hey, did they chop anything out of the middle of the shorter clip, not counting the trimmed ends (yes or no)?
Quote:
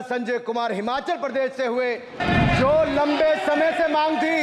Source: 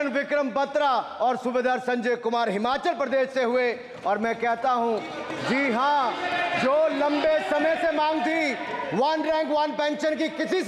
yes